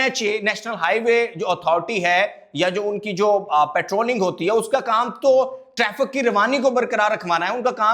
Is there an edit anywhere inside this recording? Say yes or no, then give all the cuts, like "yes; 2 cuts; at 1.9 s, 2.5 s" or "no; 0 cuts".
no; 0 cuts